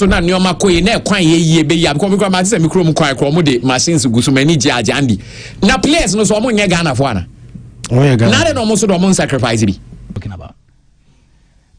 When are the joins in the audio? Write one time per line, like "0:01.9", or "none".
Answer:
0:10.2